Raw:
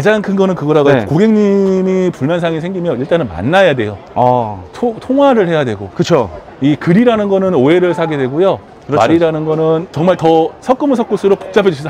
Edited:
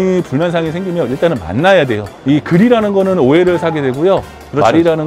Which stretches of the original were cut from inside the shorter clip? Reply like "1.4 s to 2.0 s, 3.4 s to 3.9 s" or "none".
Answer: 4.0 s to 6.4 s

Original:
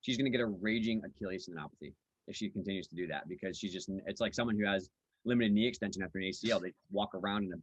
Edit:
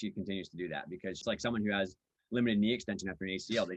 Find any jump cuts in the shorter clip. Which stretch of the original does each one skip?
3.6 s to 4.1 s

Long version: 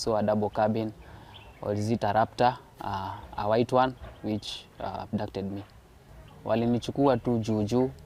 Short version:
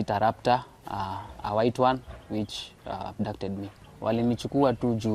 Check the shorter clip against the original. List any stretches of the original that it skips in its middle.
5.8 s to 6.3 s

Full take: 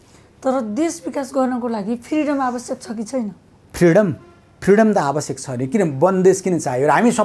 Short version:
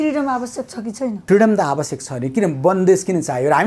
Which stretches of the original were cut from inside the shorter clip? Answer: 3.3 s to 4.6 s

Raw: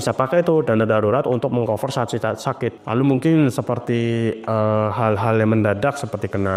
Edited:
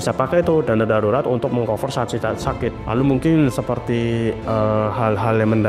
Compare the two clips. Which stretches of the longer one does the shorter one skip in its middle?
none

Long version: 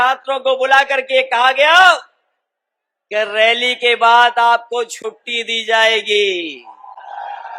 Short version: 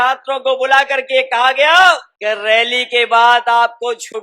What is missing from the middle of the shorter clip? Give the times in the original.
2.1 s to 3.0 s

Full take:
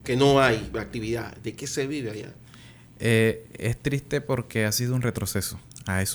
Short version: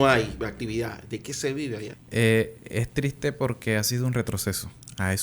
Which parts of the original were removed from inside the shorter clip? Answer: 2.3 s to 2.8 s

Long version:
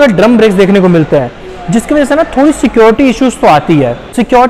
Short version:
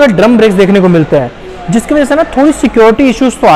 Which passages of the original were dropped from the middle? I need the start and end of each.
none

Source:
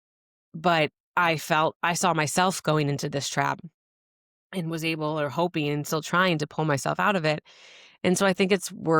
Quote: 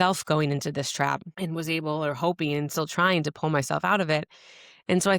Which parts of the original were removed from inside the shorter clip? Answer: 3.7 s to 4.4 s

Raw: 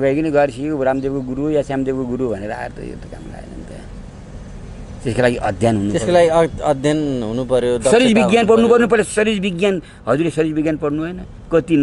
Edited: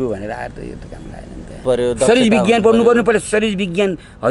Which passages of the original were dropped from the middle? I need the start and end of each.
3.8 s to 7.4 s

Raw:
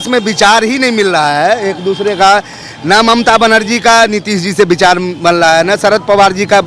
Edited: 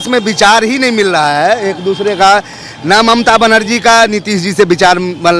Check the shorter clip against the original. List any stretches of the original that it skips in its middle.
none

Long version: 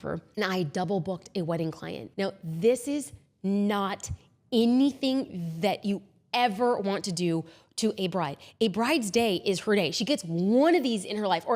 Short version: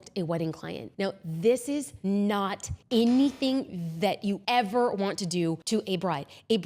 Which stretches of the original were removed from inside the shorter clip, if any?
3.1 s to 3.3 s, 4.1 s to 4.3 s, 6.0 s to 6.3 s, 7.5 s to 7.7 s

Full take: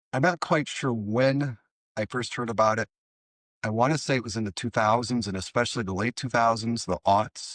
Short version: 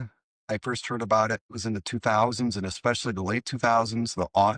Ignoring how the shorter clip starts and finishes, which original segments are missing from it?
3.1 s to 4.3 s

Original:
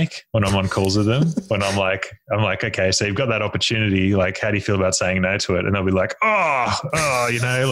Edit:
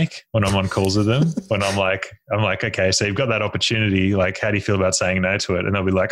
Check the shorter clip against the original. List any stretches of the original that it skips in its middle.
none

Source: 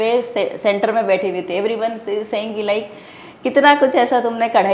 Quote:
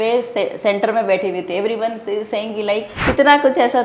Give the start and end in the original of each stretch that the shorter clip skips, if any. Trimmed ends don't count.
2.9 s to 3.3 s

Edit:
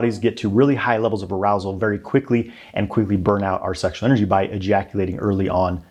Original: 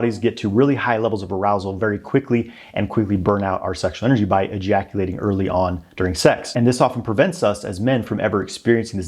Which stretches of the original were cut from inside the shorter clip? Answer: none

